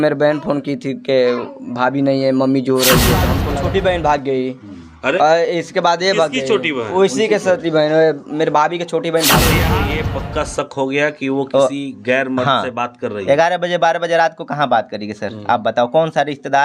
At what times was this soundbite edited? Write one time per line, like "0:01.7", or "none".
0:03.3
0:09.8